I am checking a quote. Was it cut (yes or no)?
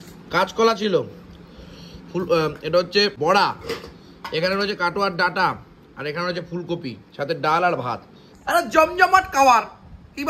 yes